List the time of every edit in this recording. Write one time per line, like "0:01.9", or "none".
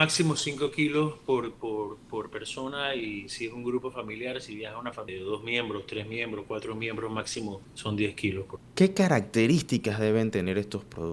0:05.1
0:07.7
0:08.6